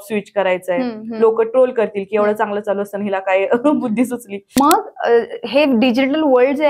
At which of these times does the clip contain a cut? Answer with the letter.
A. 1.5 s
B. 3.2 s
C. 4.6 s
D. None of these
C